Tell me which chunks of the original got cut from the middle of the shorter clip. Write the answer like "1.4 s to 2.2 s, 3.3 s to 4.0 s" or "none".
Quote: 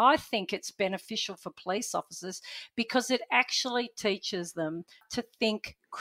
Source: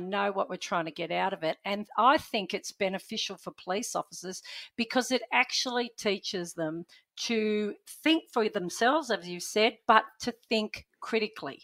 7.1 s to 10.2 s

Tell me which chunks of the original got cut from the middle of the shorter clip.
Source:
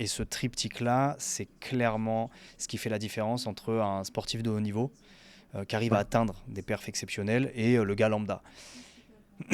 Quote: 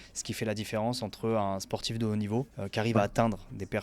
5.0 s to 5.5 s

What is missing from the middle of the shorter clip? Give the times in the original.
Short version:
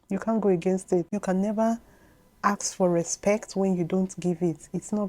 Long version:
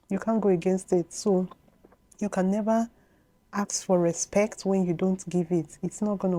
1.1 s to 2.2 s

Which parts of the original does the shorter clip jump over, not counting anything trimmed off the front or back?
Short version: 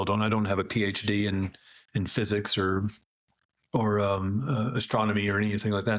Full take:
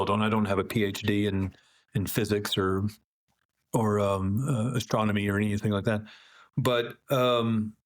none

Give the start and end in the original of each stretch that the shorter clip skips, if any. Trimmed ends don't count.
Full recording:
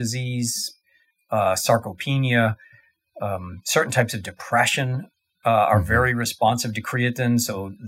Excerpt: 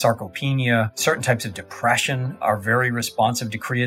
2.6 s to 3.6 s, 5.1 s to 5.7 s

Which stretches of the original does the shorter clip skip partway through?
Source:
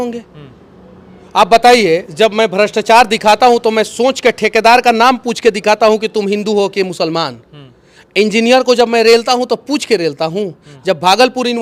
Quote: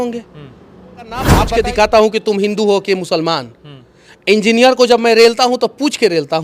1.3 s to 5.2 s

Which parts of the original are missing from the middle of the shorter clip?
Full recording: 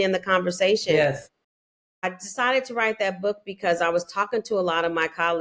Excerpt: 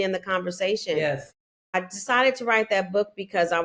1.0 s to 1.2 s

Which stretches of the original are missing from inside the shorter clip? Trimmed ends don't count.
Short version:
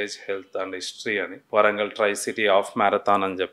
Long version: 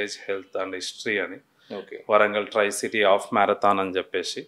1.4 s to 1.9 s

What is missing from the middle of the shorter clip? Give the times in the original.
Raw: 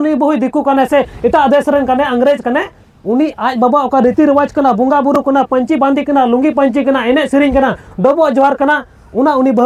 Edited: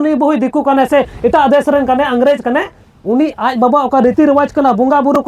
none

